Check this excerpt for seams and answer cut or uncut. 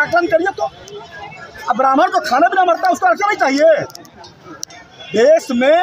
uncut